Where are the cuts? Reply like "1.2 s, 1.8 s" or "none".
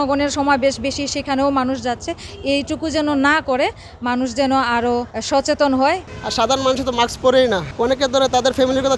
5.1 s, 6.1 s, 7.7 s